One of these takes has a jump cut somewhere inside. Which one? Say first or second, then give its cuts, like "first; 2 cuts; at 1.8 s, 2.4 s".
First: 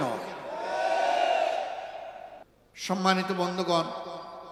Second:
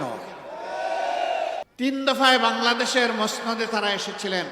second; 1 cut; at 1.7 s